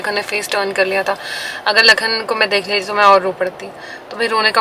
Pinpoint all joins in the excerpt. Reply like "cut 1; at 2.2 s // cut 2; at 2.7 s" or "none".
none